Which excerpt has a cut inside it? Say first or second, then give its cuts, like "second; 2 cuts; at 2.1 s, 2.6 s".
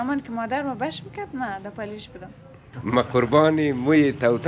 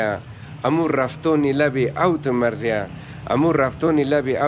first; 1 cut; at 2.7 s